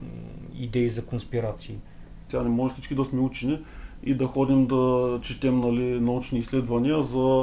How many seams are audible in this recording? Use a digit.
1